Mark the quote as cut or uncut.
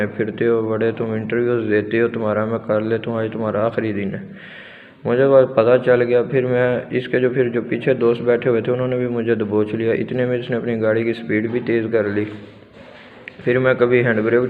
uncut